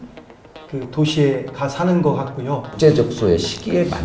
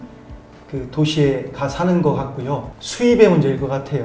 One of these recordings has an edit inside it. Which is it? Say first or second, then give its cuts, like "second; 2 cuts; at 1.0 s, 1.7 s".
first; 1 cut; at 2.7 s